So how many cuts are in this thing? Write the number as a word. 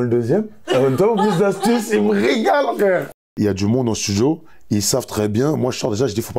one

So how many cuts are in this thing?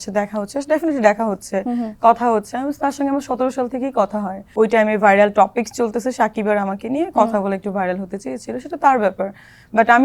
one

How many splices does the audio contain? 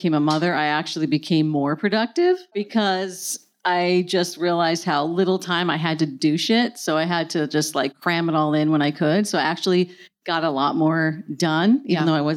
one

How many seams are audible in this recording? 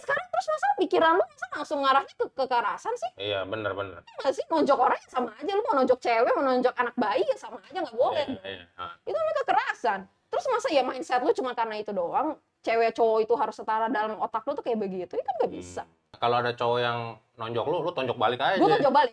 one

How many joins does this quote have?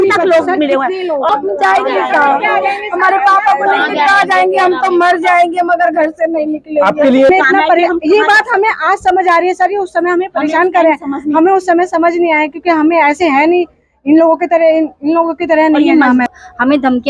three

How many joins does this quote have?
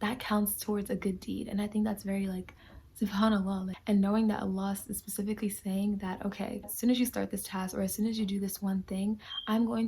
two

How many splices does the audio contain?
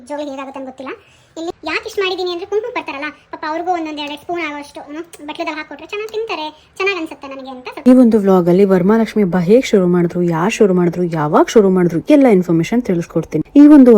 two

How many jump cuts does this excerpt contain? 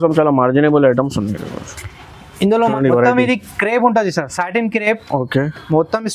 one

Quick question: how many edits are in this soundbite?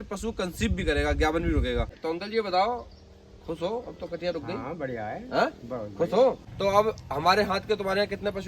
two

